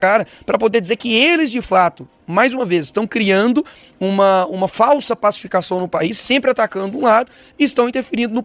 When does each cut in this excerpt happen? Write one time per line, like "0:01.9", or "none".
none